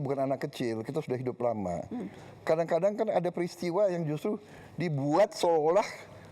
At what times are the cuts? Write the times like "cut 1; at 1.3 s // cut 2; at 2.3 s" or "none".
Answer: none

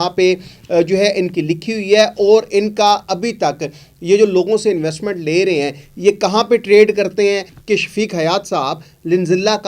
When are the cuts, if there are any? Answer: cut 1; at 7.5 s

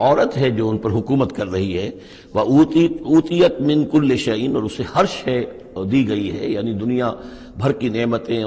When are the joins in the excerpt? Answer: none

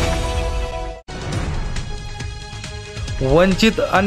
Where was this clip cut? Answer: none

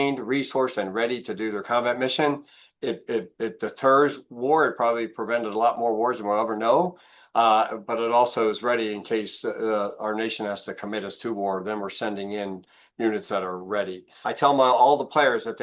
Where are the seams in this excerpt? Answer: cut 1; at 14.1 s

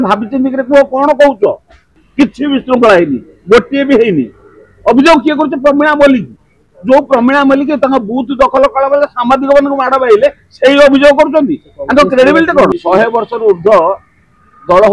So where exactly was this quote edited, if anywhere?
cut 1; at 2.0 s // cut 2; at 12.7 s

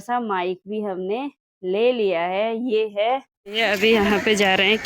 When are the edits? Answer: cut 1; at 3.4 s

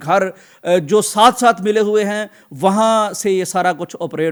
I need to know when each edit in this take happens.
none

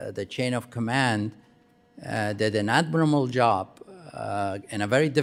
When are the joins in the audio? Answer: none

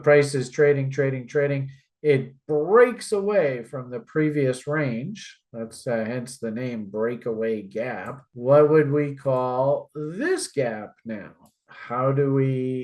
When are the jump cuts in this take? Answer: none

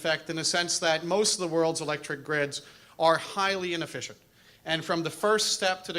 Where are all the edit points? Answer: cut 1; at 4.9 s

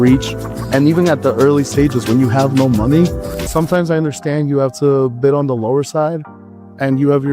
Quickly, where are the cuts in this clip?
cut 1; at 3.3 s

